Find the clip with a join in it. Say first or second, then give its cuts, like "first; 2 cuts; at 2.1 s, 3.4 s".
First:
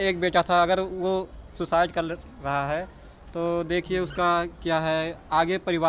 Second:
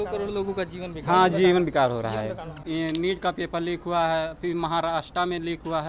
second; 1 cut; at 2.5 s